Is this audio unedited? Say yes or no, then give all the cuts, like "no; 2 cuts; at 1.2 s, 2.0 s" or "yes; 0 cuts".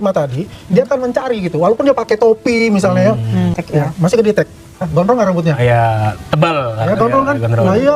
no; 2 cuts; at 3.6 s, 4.9 s